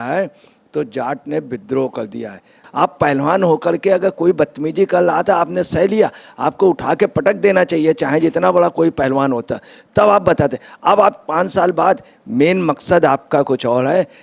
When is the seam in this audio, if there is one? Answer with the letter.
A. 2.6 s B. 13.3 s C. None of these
A